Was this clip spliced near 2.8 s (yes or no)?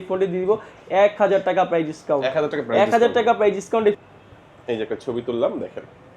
no